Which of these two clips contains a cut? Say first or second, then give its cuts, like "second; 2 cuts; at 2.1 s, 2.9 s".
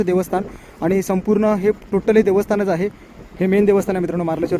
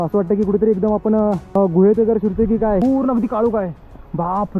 second; 2 cuts; at 1.5 s, 2.8 s